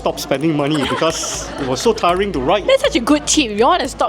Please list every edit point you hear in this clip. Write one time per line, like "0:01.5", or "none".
0:02.6